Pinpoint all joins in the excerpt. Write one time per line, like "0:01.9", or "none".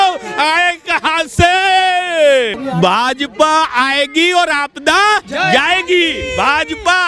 0:02.6
0:05.3